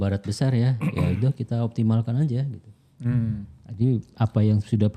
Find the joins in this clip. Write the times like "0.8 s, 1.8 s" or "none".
none